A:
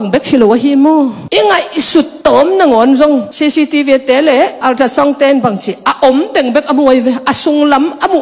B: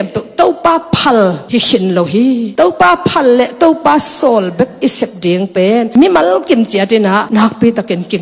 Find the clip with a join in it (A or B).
B